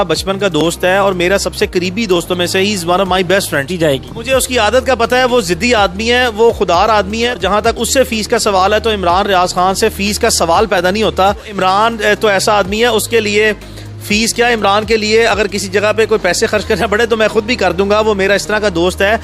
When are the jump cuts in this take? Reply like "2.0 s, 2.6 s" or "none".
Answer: 3.8 s, 7.4 s, 11.5 s